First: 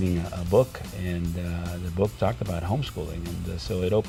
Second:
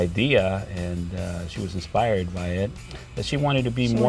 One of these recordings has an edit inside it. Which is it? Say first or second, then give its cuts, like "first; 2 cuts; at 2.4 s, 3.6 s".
second; 1 cut; at 2.9 s